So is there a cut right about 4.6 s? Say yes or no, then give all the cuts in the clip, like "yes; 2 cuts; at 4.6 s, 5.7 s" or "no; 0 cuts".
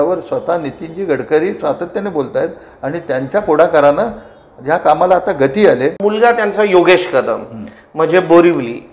no; 1 cut; at 6.0 s